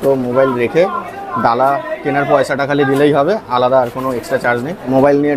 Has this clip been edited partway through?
no; 0 cuts

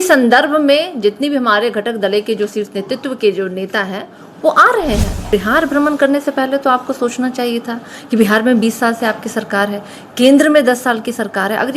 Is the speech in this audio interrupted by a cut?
yes; 1 cut; at 5.3 s

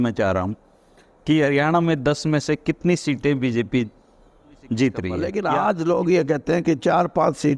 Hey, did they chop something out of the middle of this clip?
yes; 1 cut; at 5.2 s

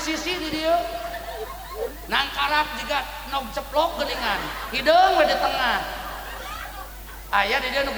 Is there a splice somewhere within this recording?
no; 0 cuts

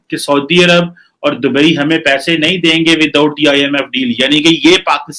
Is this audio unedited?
yes; 0 cuts

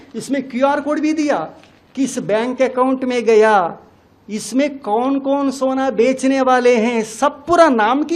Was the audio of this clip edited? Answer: no; 0 cuts

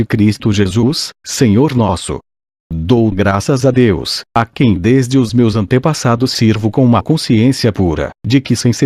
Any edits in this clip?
yes; 1 cut; at 5.7 s

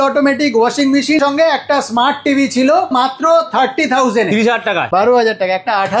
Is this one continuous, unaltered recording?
no; 3 cuts; at 1.2 s, 2.9 s, 4.8 s

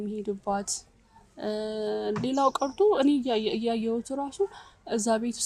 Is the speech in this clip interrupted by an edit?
no; 0 cuts

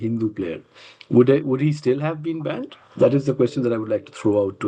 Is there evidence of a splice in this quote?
no; 0 cuts

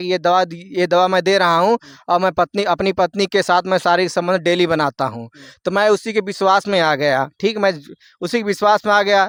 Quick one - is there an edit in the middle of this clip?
no; 0 cuts

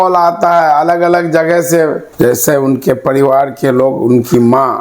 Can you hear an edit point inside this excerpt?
yes; 1 cut; at 2.0 s

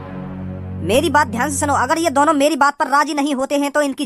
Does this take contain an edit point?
no; 0 cuts

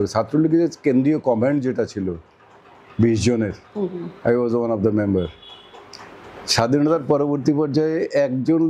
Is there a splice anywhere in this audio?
no; 0 cuts

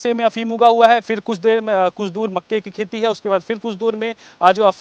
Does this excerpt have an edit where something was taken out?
no; 0 cuts

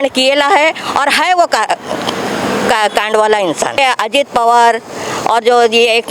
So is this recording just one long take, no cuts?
no; 1 cut; at 3.8 s

